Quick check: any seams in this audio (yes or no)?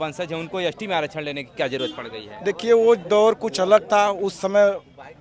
no